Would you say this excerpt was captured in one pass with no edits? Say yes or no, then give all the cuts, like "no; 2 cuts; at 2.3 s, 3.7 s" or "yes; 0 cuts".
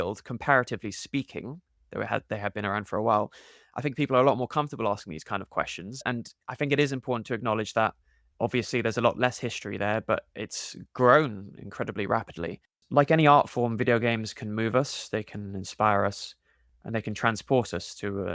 no; 1 cut; at 12.8 s